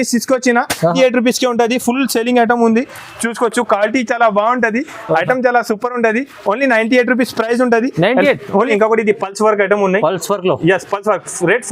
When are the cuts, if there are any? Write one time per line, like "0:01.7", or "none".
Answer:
0:00.9
0:08.7